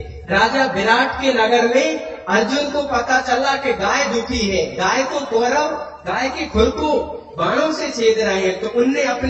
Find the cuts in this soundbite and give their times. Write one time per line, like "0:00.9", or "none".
none

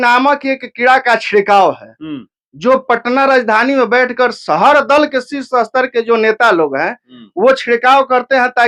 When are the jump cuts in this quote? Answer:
none

